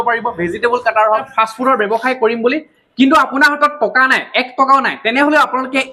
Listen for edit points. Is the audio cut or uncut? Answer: cut